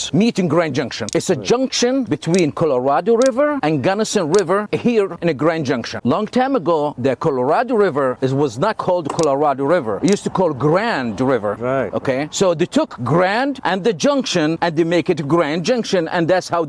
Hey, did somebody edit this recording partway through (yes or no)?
no